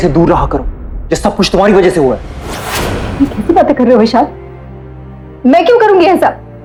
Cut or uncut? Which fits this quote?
uncut